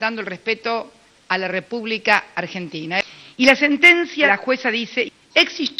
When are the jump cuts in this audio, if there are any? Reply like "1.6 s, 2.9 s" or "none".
3.0 s, 4.3 s